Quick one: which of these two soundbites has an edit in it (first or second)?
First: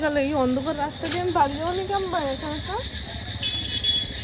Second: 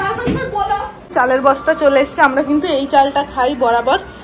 second